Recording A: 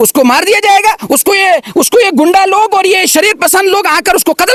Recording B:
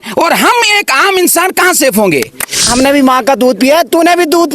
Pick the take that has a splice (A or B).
B